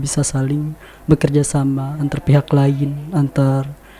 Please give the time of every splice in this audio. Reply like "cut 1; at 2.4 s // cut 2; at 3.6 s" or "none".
none